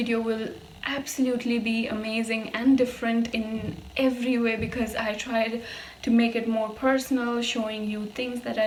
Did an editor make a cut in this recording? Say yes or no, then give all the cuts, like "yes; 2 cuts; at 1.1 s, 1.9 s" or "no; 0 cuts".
no; 0 cuts